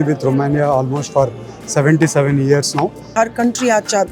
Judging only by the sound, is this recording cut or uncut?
cut